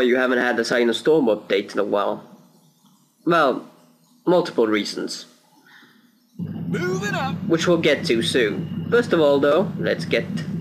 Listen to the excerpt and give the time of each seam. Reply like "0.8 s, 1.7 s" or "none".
none